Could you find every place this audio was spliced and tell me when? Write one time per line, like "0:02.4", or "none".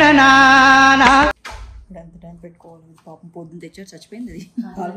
0:01.4